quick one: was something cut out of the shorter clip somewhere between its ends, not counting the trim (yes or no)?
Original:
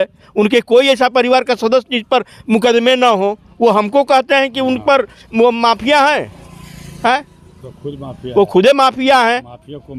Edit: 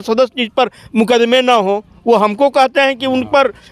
no